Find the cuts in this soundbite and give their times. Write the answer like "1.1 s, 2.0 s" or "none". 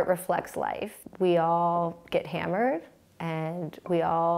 0.9 s